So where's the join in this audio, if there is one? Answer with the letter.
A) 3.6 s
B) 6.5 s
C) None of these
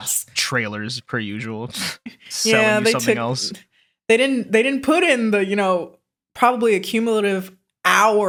C